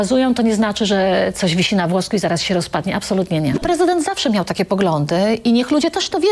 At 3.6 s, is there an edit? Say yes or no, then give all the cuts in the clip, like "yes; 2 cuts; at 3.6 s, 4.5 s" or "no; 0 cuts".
yes; 1 cut; at 3.6 s